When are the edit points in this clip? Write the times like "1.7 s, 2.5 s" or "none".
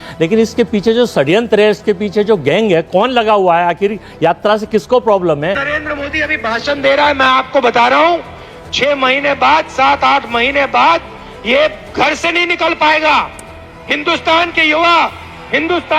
5.7 s